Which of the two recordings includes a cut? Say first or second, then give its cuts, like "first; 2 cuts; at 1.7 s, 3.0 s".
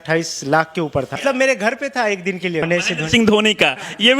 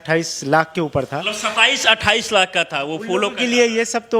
first; 2 cuts; at 1.2 s, 2.7 s